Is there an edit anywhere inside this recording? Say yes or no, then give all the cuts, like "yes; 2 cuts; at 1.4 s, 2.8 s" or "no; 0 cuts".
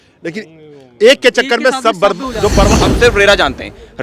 yes; 1 cut; at 2.7 s